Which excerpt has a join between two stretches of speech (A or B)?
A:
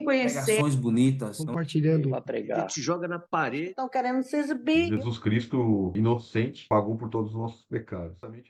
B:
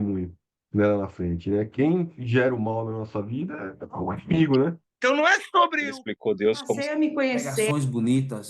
B